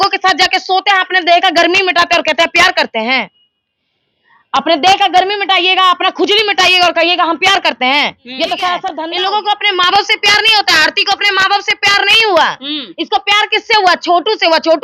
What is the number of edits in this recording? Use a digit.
1